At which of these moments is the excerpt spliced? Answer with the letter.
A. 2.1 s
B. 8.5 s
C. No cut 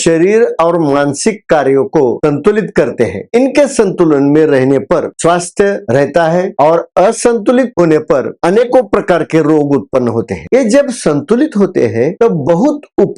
C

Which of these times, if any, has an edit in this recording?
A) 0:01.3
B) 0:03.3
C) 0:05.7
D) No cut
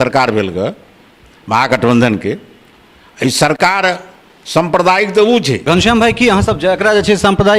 C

